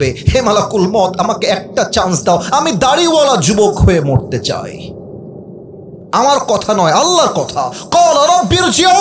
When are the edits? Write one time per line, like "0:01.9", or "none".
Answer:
none